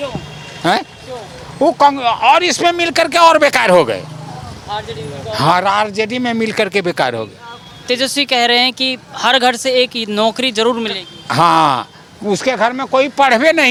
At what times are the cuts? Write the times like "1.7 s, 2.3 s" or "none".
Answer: none